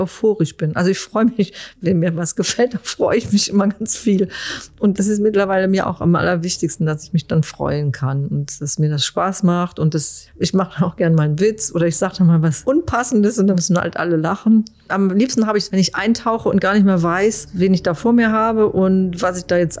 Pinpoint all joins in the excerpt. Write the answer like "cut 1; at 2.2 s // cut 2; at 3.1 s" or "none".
cut 1; at 1.7 s // cut 2; at 4.9 s // cut 3; at 10.2 s // cut 4; at 13.5 s // cut 5; at 17.4 s